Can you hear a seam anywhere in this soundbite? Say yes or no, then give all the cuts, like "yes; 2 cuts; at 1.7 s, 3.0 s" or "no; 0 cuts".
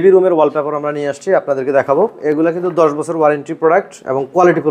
yes; 1 cut; at 2.2 s